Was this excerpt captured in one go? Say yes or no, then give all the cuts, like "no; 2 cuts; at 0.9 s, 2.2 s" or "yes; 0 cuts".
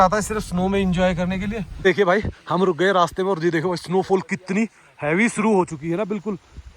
no; 1 cut; at 1.7 s